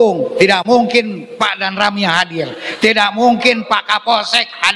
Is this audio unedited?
no; 1 cut; at 1.2 s

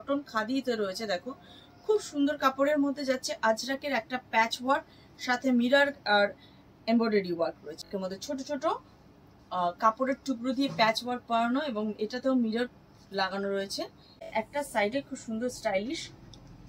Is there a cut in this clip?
yes; 2 cuts; at 7.9 s, 14.3 s

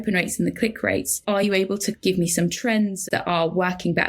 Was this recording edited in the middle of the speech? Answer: yes; 1 cut; at 3.0 s

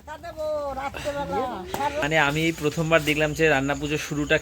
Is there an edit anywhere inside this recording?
yes; 1 cut; at 2.0 s

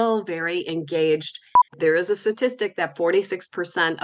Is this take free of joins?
no; 1 cut; at 1.7 s

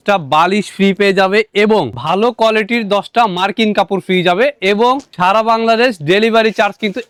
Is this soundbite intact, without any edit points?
yes; 0 cuts

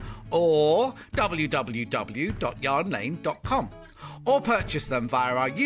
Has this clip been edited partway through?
no; 0 cuts

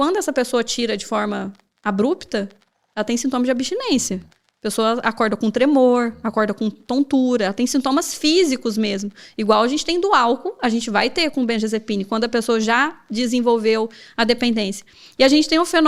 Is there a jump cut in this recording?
no; 0 cuts

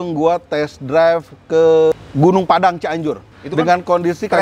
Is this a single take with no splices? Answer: no; 2 cuts; at 1.9 s, 3.3 s

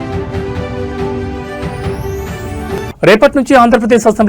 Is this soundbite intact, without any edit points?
no; 1 cut; at 2.5 s

